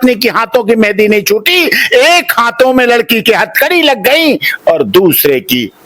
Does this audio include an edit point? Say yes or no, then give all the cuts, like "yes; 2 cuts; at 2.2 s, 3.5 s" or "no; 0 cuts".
no; 0 cuts